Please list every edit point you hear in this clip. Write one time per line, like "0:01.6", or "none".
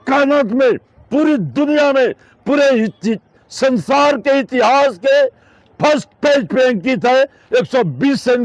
none